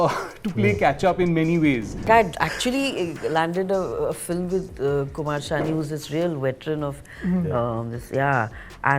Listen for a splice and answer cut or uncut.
cut